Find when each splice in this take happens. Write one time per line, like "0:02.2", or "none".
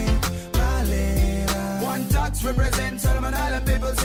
none